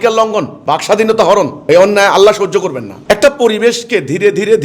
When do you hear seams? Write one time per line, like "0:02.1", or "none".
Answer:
0:03.0